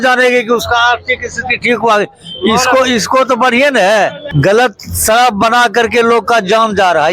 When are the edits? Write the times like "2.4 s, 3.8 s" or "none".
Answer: 4.2 s

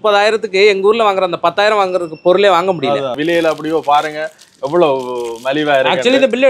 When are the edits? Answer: 3.2 s

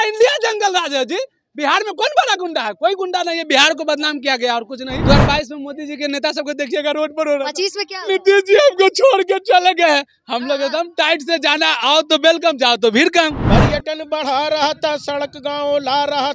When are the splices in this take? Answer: 5.0 s, 13.4 s

